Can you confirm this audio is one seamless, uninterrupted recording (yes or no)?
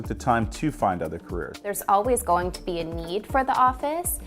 no